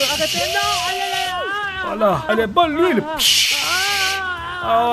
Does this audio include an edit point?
yes; 1 cut; at 2.3 s

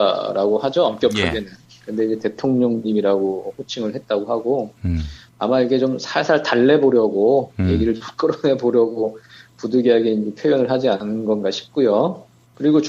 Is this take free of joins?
no; 1 cut; at 6.1 s

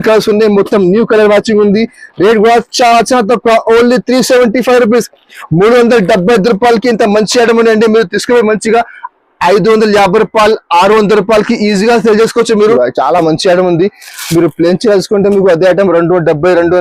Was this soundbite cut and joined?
yes; 1 cut; at 12.8 s

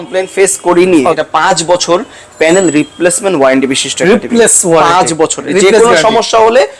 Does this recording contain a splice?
yes; 2 cuts; at 1.2 s, 5.5 s

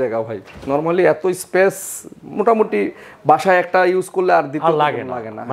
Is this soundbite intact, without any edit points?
yes; 0 cuts

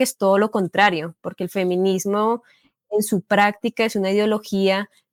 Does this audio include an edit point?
no; 0 cuts

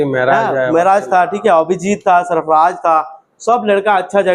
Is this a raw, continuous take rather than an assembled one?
yes; 0 cuts

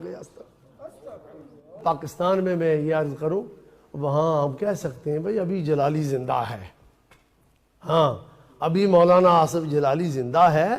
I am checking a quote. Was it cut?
yes; 1 cut; at 1.8 s

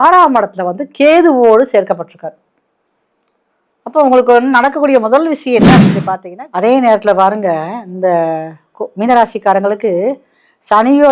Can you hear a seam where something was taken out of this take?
yes; 1 cut; at 6.0 s

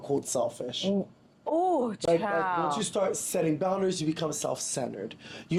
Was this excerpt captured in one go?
yes; 0 cuts

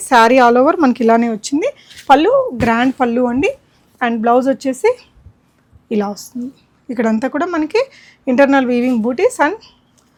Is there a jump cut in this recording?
no; 0 cuts

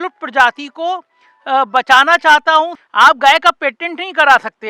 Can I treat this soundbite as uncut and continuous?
no; 1 cut; at 2.8 s

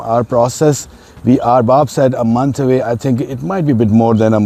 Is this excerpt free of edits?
yes; 0 cuts

